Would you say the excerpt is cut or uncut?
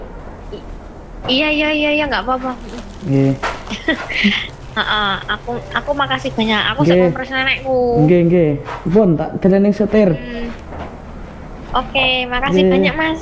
uncut